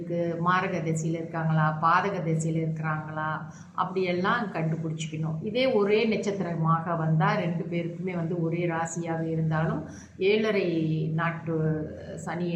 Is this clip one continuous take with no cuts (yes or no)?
yes